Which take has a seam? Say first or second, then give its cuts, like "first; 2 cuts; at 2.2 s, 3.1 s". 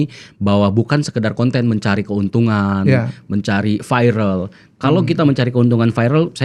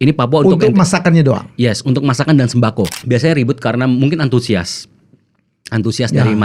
second; 1 cut; at 3.0 s